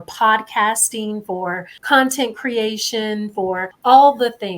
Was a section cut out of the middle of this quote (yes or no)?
yes